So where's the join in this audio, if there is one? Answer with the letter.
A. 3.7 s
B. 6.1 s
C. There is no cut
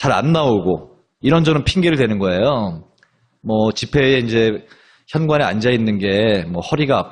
A